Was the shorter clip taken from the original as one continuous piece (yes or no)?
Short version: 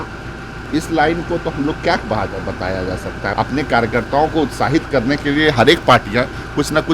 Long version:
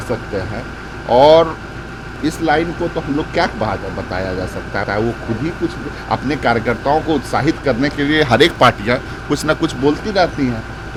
no